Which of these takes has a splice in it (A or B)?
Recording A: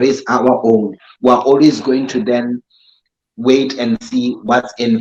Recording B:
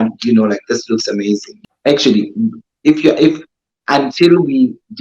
B